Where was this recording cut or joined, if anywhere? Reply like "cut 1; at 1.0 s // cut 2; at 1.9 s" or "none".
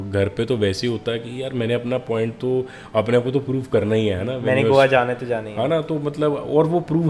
none

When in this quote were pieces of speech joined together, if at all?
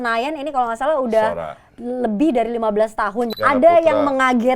cut 1; at 3.3 s

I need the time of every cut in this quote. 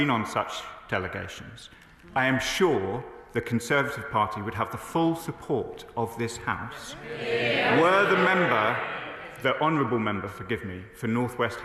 none

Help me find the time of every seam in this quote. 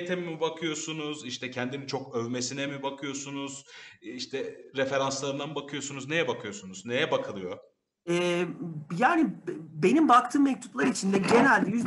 none

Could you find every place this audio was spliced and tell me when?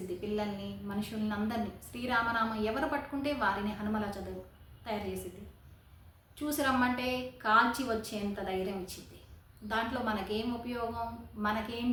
none

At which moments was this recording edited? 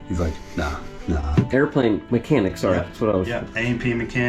cut 1; at 1.5 s

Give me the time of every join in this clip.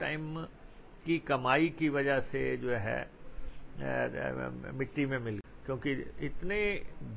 cut 1; at 5.4 s

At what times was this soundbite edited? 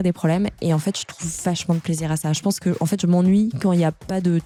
none

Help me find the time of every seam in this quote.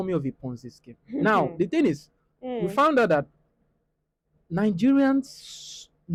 none

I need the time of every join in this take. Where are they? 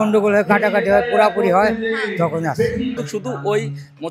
cut 1; at 3.0 s

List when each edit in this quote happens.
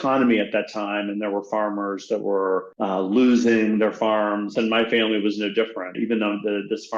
cut 1; at 2.7 s // cut 2; at 4.5 s // cut 3; at 6.0 s

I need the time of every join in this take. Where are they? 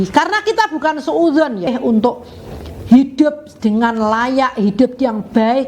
cut 1; at 1.7 s

